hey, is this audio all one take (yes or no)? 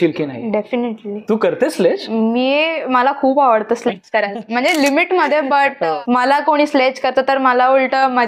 no